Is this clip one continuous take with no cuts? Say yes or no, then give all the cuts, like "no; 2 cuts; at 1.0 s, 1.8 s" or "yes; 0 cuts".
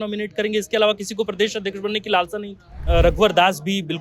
no; 1 cut; at 2.8 s